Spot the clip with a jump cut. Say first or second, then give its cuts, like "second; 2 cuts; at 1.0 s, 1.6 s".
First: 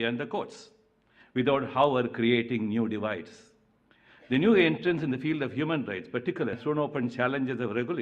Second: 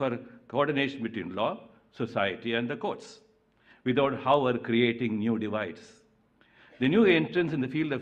first; 1 cut; at 6.6 s